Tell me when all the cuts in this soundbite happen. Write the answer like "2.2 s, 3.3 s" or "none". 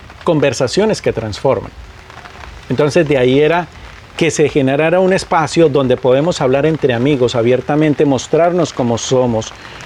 none

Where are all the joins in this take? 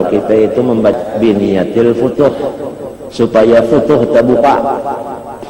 1.0 s

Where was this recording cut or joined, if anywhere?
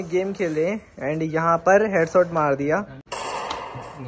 3.0 s

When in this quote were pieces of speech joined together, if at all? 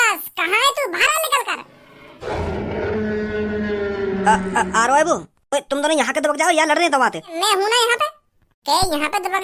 7.3 s

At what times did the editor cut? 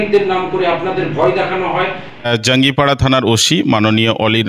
2.3 s

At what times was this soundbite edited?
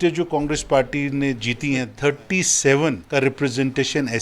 1.9 s, 3.0 s

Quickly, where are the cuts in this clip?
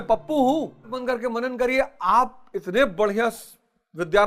1.0 s

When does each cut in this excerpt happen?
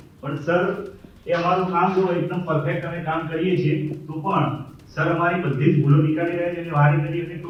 none

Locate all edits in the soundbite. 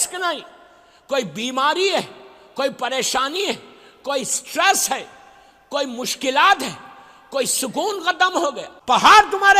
8.7 s

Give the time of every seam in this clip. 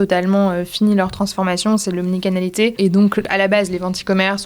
3.1 s

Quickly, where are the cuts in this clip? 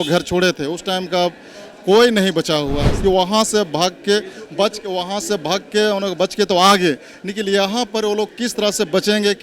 2.9 s

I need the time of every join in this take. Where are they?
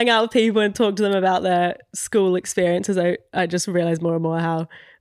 none

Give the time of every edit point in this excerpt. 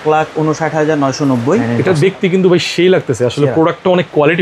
1.7 s

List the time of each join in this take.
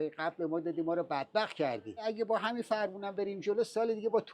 2.0 s

